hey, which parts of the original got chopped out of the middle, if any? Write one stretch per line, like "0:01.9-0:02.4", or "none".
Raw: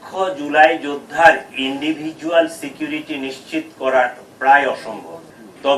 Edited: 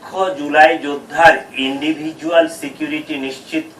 none